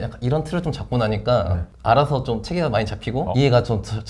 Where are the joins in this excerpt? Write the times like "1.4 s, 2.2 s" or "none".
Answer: 1.6 s, 3.2 s